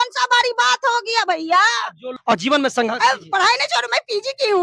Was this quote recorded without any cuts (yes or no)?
no